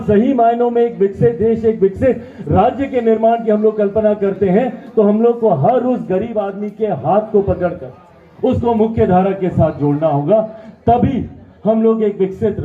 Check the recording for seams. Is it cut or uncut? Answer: uncut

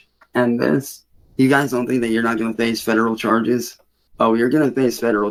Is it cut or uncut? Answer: uncut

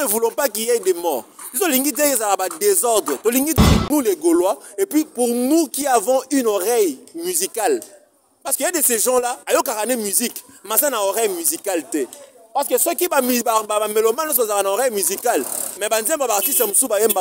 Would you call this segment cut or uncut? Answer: cut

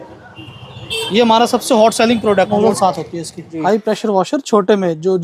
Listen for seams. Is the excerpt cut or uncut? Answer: cut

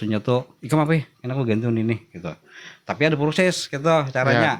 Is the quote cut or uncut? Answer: uncut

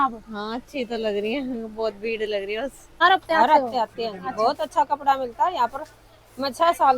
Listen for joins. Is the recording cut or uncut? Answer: cut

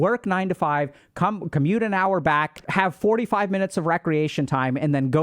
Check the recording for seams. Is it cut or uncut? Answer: cut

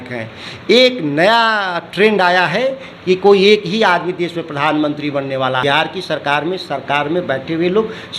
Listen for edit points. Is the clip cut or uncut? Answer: cut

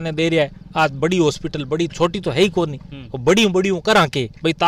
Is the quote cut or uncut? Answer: uncut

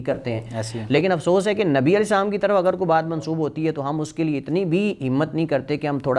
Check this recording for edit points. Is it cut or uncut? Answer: uncut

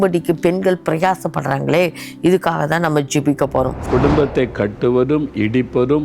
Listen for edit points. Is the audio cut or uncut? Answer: cut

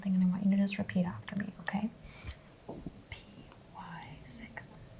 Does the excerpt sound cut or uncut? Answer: cut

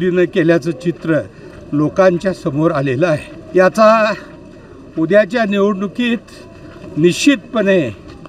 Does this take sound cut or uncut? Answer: cut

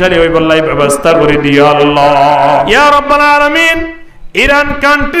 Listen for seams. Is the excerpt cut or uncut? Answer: cut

